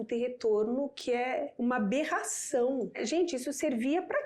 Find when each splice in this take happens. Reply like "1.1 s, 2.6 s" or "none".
1.5 s, 3.0 s